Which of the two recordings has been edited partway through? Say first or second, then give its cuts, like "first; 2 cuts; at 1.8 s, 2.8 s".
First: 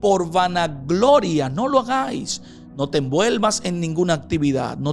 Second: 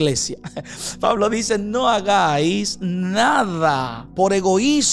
second; 1 cut; at 4.0 s